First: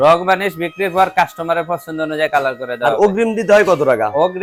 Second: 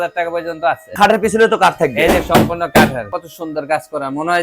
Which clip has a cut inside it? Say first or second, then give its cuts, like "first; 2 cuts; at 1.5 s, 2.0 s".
second; 2 cuts; at 0.9 s, 3.0 s